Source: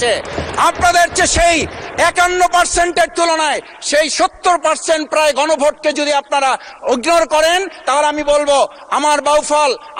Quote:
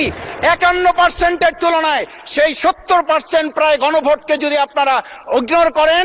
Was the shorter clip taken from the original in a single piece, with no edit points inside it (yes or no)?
yes